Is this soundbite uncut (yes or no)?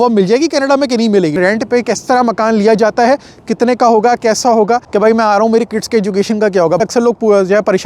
no